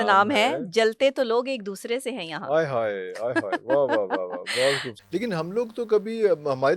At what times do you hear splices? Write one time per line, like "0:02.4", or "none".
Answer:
0:04.9